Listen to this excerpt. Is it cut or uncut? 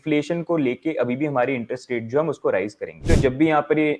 cut